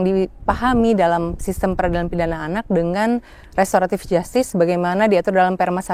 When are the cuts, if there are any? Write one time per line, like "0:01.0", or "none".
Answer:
none